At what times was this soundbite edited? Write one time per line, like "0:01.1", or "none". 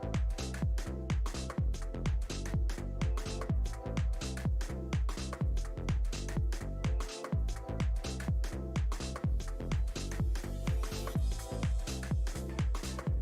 0:12.2